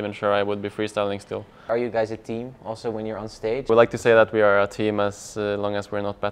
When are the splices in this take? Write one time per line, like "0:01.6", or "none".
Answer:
0:01.7
0:03.7